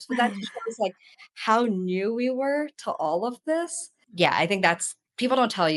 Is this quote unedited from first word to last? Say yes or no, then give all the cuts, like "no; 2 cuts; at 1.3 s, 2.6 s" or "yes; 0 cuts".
no; 1 cut; at 3.9 s